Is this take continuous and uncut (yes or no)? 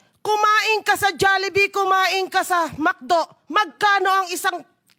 yes